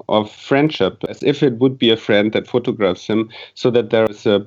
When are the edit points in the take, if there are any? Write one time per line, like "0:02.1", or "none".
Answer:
0:01.1